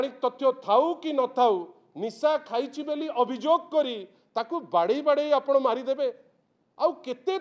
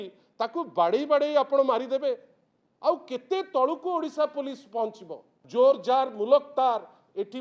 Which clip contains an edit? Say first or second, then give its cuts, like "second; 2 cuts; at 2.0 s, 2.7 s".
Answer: second; 1 cut; at 5.4 s